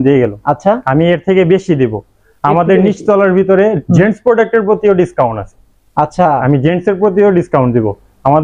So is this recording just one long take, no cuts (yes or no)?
yes